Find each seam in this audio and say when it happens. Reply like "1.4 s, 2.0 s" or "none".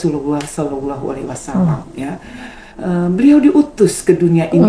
none